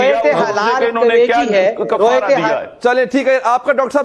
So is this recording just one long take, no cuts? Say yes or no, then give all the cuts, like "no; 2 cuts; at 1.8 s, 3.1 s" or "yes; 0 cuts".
yes; 0 cuts